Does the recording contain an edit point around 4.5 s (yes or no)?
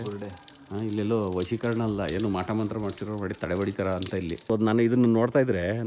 yes